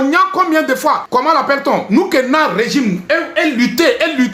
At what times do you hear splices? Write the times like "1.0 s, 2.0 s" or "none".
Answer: 1.0 s